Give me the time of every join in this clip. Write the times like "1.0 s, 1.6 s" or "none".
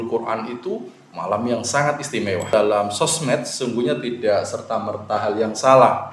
2.5 s